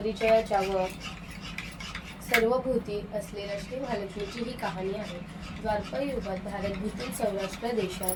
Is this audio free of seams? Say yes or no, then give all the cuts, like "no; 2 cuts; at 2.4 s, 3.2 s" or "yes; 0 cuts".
yes; 0 cuts